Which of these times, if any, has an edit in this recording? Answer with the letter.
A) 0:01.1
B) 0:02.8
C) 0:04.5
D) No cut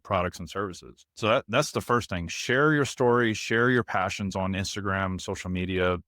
A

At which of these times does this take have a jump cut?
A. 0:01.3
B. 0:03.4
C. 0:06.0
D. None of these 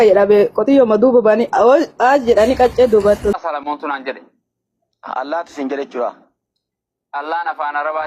B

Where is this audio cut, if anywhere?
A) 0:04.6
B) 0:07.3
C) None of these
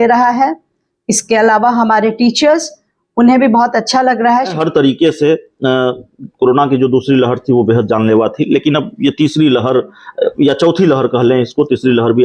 A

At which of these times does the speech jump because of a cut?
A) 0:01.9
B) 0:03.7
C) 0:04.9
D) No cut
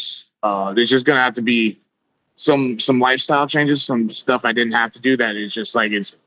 D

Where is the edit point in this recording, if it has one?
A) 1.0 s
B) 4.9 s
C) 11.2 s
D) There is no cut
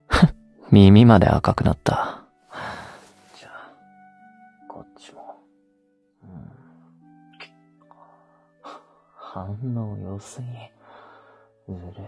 C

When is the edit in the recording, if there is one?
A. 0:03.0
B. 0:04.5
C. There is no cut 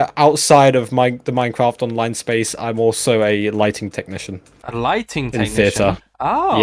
C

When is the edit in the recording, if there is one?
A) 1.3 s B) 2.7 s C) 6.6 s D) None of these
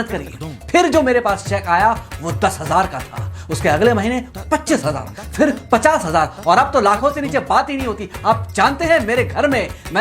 D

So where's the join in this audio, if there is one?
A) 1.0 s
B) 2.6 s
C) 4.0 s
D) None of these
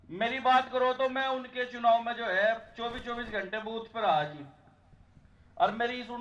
D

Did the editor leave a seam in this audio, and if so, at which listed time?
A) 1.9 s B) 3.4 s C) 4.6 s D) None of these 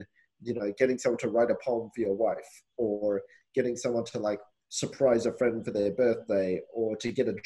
B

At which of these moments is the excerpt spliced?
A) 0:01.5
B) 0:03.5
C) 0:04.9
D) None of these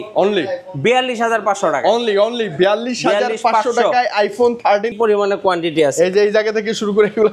C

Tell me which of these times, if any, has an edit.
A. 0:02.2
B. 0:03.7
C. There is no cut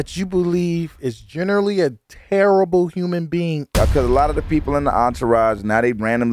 B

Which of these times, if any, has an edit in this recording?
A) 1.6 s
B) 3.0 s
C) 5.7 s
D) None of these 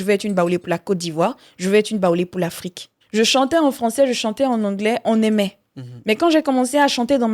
B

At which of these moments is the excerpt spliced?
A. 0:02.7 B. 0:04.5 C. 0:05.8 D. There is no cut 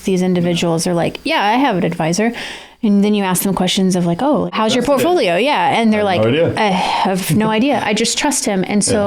B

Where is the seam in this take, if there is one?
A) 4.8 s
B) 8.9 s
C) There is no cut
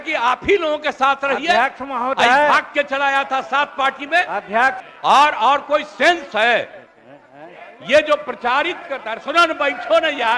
A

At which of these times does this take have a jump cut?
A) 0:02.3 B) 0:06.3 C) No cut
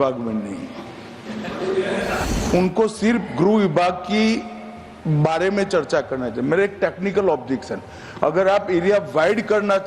A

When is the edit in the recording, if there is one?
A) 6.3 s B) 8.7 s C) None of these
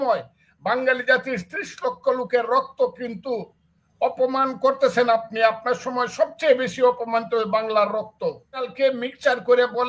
B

